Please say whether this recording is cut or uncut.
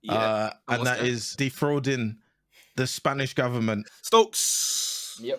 cut